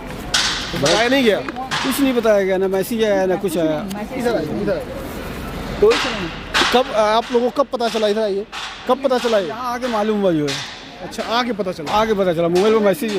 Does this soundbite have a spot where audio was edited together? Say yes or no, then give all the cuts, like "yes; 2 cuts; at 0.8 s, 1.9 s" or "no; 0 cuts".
no; 0 cuts